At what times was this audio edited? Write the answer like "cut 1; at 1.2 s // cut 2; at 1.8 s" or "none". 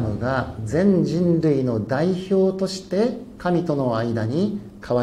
none